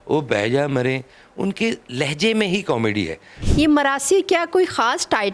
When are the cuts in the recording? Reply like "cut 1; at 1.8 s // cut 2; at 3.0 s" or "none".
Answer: cut 1; at 3.3 s